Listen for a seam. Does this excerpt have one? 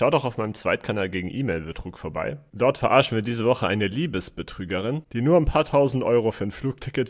no; 0 cuts

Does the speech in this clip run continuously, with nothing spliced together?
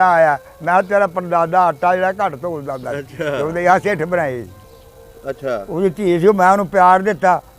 no; 1 cut; at 4.7 s

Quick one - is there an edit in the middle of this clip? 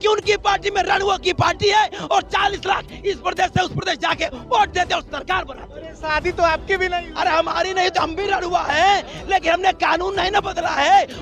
no; 0 cuts

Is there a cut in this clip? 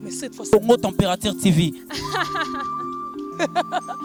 no; 0 cuts

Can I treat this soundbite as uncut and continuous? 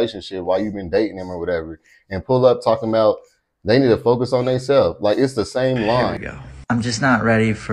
no; 1 cut; at 6.2 s

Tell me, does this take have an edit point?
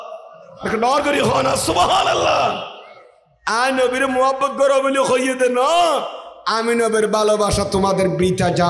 no; 0 cuts

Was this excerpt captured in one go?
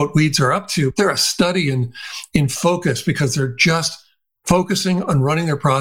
no; 1 cut; at 0.9 s

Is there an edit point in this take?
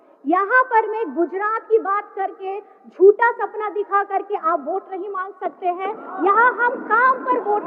no; 0 cuts

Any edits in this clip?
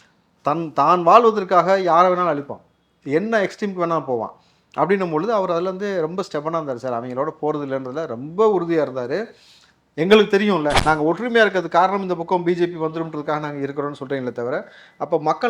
yes; 1 cut; at 10.8 s

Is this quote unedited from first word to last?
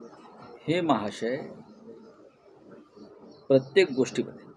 yes; 0 cuts

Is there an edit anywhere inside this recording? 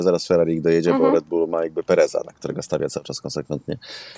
no; 0 cuts

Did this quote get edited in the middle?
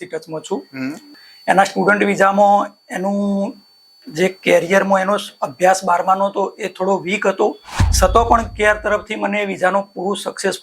yes; 1 cut; at 1.1 s

